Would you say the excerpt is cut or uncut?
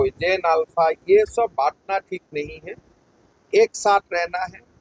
uncut